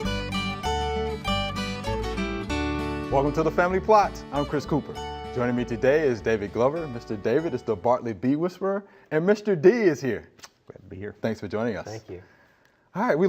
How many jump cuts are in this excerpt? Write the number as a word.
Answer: one